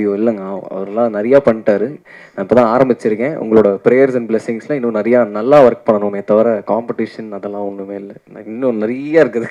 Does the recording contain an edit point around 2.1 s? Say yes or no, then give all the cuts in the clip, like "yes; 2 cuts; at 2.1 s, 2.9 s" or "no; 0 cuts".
no; 0 cuts